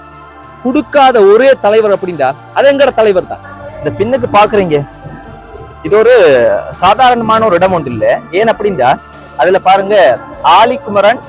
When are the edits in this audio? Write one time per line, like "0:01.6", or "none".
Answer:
0:03.4